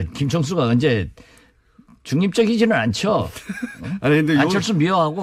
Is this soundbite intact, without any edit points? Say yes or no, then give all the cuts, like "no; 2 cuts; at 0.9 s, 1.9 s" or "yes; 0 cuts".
yes; 0 cuts